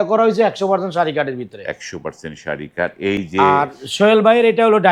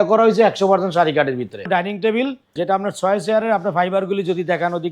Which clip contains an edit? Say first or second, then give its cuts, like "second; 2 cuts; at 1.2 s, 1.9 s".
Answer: second; 2 cuts; at 1.7 s, 2.5 s